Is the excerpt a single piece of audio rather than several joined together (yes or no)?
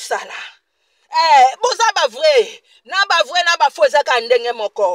yes